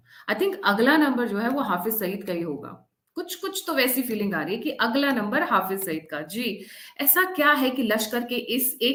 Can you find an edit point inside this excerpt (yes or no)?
no